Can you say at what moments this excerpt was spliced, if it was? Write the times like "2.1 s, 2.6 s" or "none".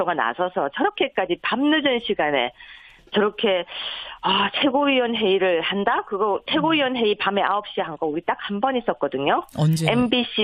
none